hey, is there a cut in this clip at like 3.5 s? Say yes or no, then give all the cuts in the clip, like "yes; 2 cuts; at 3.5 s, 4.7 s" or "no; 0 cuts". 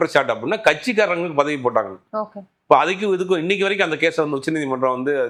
no; 0 cuts